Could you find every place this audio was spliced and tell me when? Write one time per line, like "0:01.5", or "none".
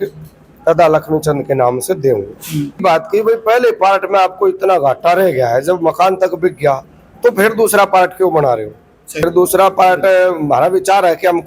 0:02.8
0:09.2